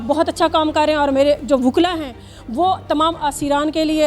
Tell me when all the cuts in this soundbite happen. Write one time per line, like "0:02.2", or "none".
none